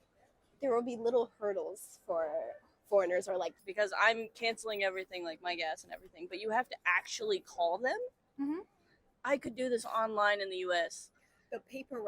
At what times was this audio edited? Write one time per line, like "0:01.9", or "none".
0:03.6
0:09.1